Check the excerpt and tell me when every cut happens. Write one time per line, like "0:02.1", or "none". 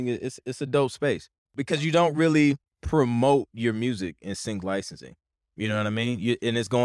0:01.6
0:02.7